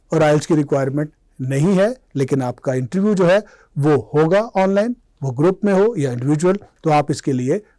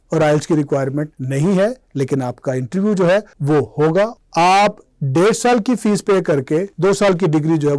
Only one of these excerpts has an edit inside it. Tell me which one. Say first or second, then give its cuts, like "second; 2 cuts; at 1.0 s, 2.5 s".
second; 4 cuts; at 1.2 s, 3.3 s, 4.1 s, 6.7 s